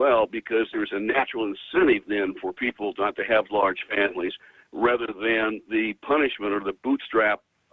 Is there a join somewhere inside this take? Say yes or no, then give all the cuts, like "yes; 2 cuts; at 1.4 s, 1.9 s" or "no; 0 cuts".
yes; 1 cut; at 5.6 s